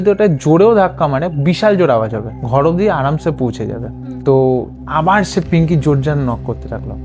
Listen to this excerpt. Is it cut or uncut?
uncut